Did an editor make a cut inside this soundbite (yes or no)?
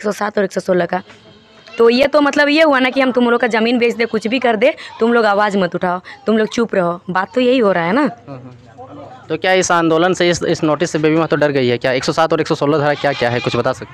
no